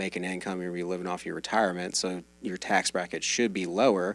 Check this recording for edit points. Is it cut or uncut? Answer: uncut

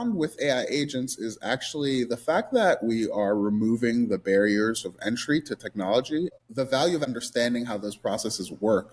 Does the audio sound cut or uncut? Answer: cut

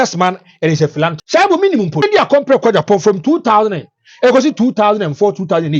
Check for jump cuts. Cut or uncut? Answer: cut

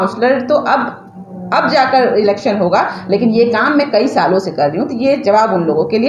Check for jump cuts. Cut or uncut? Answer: uncut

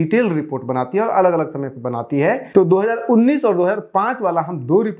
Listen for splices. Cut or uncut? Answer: cut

